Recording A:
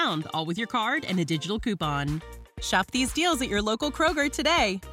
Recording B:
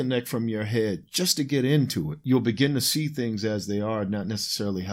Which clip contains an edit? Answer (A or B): B